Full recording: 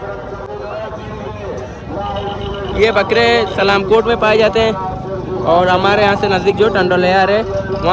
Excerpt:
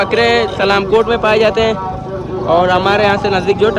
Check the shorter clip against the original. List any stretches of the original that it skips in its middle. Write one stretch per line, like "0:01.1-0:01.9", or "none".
none